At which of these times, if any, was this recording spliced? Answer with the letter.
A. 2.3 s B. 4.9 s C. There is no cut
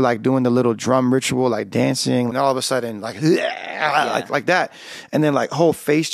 A